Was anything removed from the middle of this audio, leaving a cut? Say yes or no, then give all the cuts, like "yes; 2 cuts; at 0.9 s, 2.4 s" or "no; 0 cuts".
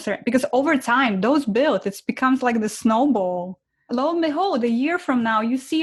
no; 0 cuts